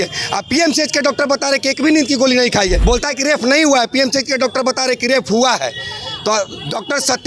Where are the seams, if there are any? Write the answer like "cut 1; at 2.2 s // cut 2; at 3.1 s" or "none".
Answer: cut 1; at 2.8 s